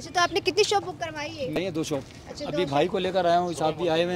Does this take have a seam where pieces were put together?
yes; 1 cut; at 1.6 s

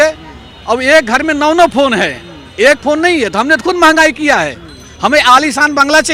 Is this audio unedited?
yes; 0 cuts

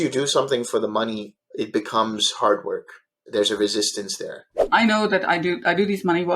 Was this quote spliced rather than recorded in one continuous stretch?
yes; 3 cuts; at 1.3 s, 3.1 s, 4.7 s

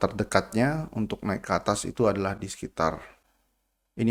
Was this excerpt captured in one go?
yes; 0 cuts

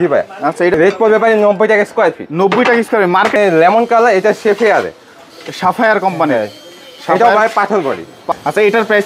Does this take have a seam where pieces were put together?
yes; 3 cuts; at 0.7 s, 3.4 s, 8.3 s

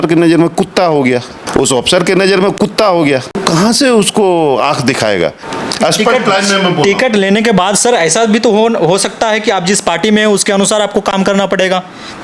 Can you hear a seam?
yes; 3 cuts; at 1.4 s, 3.4 s, 5.5 s

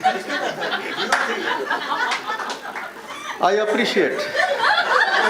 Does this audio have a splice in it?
no; 0 cuts

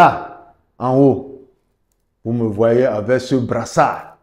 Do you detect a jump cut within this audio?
no; 0 cuts

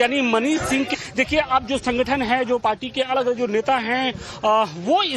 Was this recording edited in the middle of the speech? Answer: yes; 1 cut; at 1.0 s

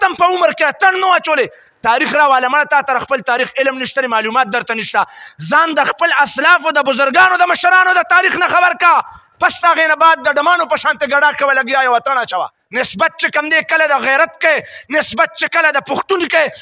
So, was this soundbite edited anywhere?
yes; 1 cut; at 12.5 s

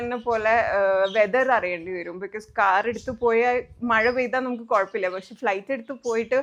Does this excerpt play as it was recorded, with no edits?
yes; 0 cuts

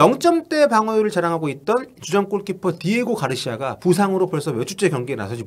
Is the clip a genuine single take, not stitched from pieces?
yes; 0 cuts

